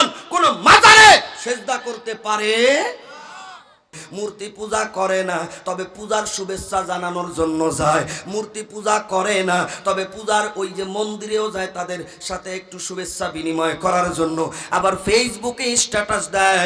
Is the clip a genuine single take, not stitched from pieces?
no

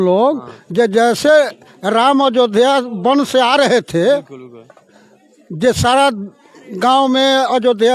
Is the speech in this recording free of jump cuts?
yes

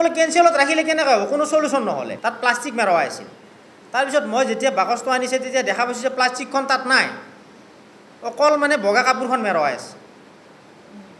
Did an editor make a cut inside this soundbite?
yes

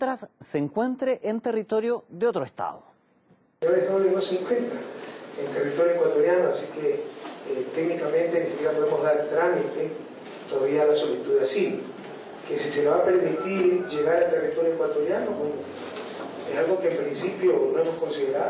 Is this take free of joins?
no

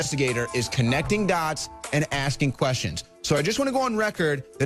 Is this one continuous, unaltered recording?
yes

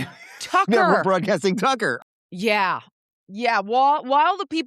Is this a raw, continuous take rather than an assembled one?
no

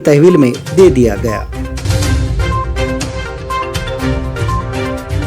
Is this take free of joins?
no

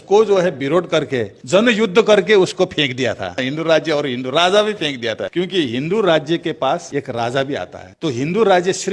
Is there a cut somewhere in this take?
yes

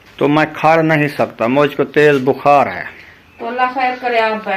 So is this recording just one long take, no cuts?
yes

